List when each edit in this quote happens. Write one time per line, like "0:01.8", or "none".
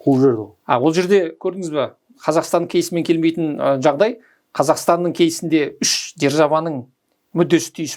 none